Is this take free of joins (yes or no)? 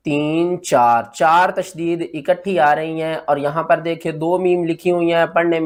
yes